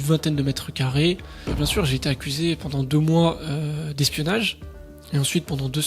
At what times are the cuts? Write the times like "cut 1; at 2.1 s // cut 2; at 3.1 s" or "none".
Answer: cut 1; at 1.5 s